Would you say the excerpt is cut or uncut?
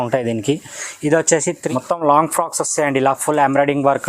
cut